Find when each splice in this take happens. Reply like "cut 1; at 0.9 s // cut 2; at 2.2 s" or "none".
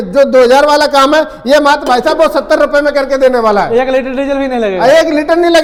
none